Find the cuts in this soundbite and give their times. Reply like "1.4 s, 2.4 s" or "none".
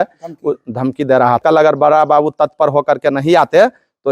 1.4 s